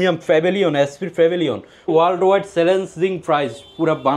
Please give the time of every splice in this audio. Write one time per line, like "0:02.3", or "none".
0:01.9